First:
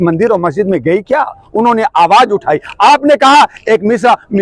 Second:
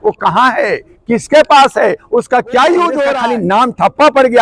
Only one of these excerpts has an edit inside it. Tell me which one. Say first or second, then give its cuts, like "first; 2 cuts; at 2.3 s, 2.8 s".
second; 1 cut; at 3.2 s